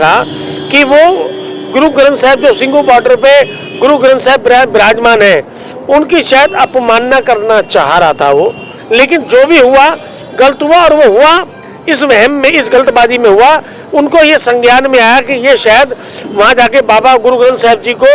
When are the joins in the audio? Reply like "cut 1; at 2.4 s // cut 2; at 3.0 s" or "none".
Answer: cut 1; at 8.8 s

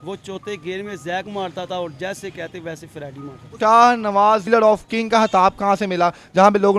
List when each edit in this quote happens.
cut 1; at 3.5 s // cut 2; at 4.4 s

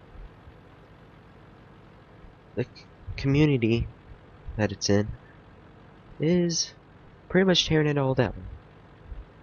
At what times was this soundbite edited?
none

